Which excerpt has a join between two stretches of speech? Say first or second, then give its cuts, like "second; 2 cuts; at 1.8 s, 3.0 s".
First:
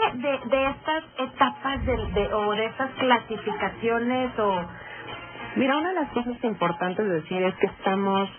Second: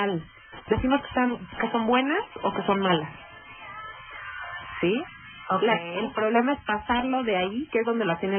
second; 1 cut; at 4.6 s